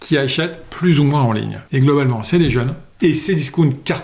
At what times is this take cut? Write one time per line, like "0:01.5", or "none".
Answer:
0:01.6
0:02.8